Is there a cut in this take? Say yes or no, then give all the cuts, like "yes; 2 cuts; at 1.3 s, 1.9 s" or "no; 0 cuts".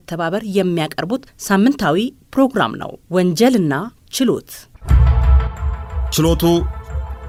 no; 0 cuts